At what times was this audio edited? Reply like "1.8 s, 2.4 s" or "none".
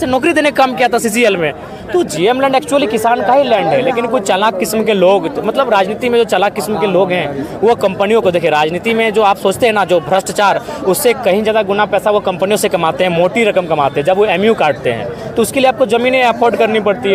none